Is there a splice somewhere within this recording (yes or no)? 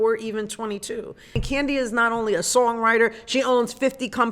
yes